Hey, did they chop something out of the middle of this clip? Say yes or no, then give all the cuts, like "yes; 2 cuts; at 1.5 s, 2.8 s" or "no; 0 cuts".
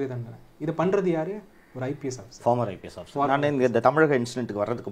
no; 0 cuts